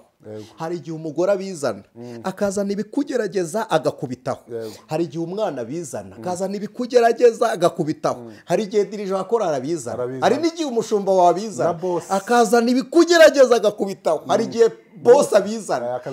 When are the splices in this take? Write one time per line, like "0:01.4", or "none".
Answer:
none

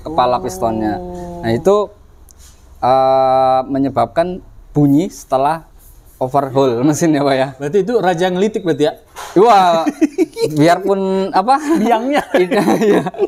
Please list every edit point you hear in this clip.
none

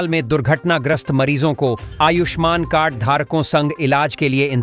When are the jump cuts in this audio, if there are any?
none

